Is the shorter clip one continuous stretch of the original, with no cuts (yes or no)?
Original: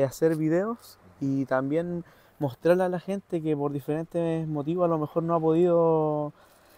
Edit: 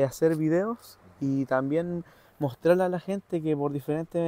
yes